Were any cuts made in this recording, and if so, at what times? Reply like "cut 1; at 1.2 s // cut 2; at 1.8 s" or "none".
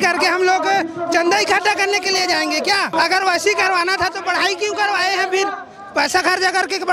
cut 1; at 2.9 s